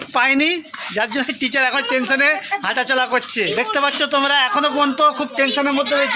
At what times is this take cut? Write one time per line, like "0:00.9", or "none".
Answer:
0:03.5